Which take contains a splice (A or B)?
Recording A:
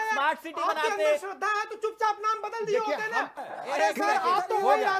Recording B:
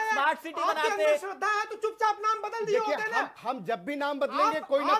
A